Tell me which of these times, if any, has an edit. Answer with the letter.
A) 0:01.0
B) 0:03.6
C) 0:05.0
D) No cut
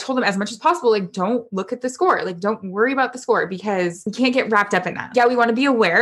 C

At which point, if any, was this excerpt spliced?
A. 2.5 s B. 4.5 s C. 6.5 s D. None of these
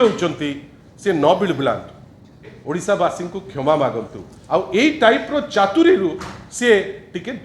A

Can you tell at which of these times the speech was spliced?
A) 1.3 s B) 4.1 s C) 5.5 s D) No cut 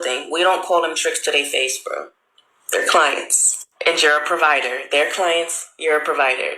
B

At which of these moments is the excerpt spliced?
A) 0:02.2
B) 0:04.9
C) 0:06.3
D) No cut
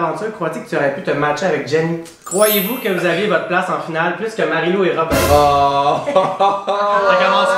A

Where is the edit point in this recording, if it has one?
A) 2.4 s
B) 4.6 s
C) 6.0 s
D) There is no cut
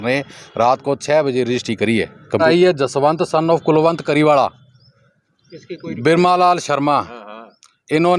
A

